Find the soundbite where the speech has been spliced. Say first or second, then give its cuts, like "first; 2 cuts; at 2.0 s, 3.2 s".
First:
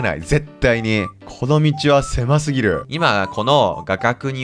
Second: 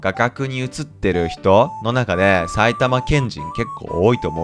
first; 2 cuts; at 1.2 s, 2.9 s